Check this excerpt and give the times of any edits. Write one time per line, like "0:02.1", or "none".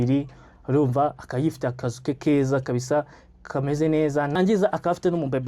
0:04.3